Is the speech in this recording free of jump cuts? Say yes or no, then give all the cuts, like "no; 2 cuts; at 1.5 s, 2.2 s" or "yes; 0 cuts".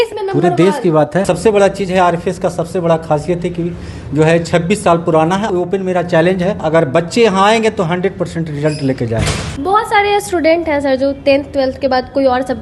no; 4 cuts; at 1.2 s, 5.5 s, 6.6 s, 9.5 s